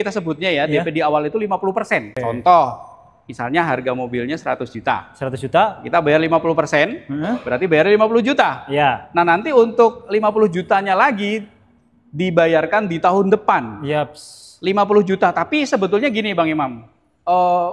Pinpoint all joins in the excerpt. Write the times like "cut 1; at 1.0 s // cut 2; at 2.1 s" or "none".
cut 1; at 2.2 s